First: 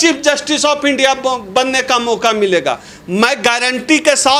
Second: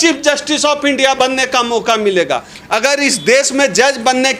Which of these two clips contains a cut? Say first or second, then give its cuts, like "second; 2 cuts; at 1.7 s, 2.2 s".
second; 2 cuts; at 1.2 s, 2.5 s